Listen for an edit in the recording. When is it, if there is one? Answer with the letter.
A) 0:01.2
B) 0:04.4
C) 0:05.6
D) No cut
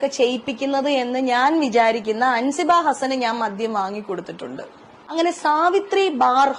B